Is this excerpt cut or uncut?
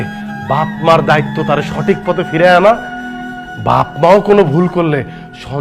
uncut